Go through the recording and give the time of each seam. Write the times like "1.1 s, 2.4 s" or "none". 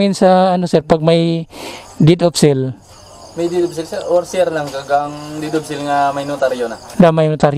none